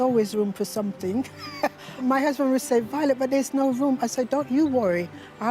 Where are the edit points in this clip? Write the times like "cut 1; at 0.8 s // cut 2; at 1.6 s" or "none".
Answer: cut 1; at 2.0 s